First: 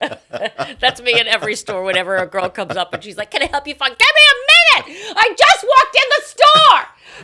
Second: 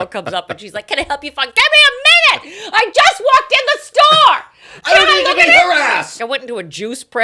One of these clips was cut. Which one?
second; 1 cut; at 6.1 s

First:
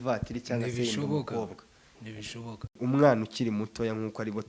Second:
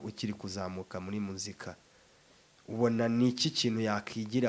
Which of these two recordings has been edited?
first; 1 cut; at 2.7 s

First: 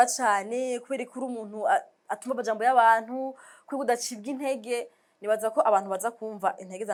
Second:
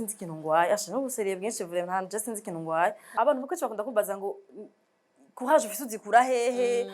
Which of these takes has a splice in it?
second; 1 cut; at 3.1 s

